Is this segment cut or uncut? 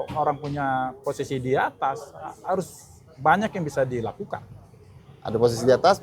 uncut